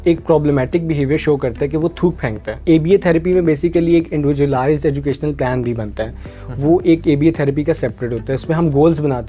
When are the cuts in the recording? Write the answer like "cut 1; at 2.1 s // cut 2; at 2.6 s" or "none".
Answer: cut 1; at 2.5 s